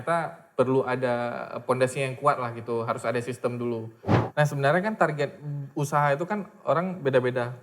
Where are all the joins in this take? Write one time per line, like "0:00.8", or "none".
0:04.0